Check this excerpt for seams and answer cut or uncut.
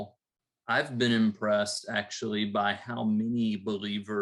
uncut